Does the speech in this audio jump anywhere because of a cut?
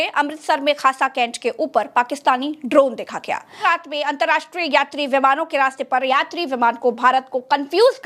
yes; 1 cut; at 3.6 s

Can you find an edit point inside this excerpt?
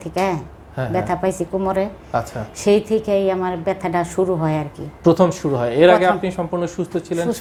no; 0 cuts

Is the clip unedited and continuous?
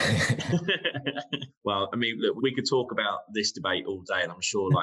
no; 2 cuts; at 1.5 s, 2.4 s

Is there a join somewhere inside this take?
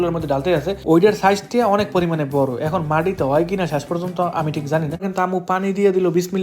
yes; 1 cut; at 5.1 s

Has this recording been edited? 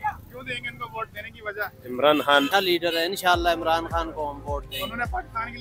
yes; 1 cut; at 2.5 s

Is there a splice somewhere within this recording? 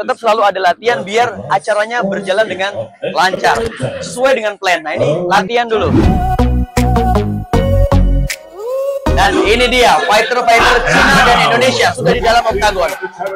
yes; 1 cut; at 6.1 s

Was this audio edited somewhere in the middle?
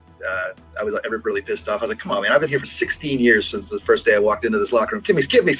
no; 0 cuts

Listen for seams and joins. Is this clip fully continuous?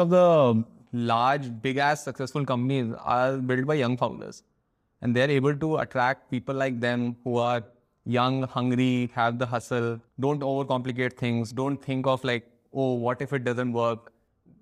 yes; 0 cuts

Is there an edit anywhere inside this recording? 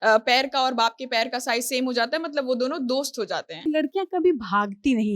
yes; 1 cut; at 3.6 s

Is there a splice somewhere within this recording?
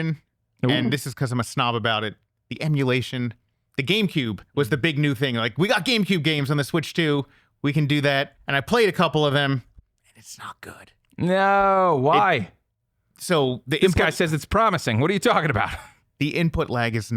yes; 1 cut; at 8.4 s

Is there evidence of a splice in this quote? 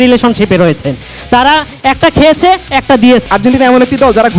yes; 1 cut; at 3.2 s

